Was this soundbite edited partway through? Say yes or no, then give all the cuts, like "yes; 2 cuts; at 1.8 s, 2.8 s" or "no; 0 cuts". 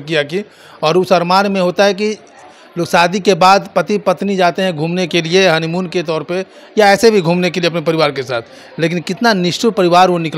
no; 0 cuts